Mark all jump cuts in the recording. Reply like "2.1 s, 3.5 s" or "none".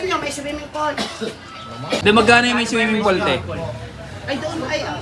none